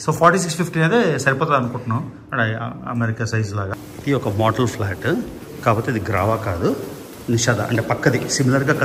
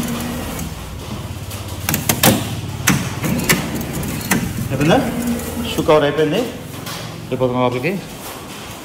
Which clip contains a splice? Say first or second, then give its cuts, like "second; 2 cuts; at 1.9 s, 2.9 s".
first; 1 cut; at 3.7 s